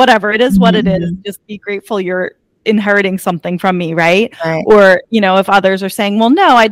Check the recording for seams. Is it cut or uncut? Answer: uncut